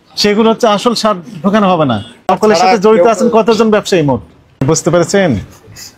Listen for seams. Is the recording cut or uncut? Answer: cut